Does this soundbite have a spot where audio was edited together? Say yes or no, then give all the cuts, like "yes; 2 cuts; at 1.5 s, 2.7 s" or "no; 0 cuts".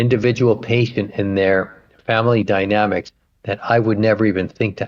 no; 0 cuts